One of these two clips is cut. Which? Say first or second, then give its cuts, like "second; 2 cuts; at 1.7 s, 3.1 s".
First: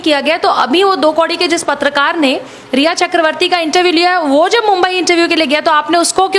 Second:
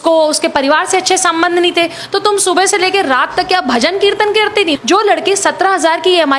second; 1 cut; at 4.8 s